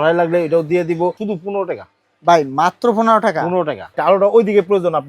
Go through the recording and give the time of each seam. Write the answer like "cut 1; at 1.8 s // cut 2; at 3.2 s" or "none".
cut 1; at 1.2 s // cut 2; at 3.9 s